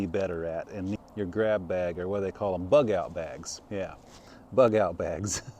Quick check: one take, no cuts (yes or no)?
no